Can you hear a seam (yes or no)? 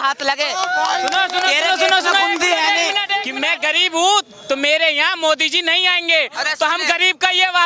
yes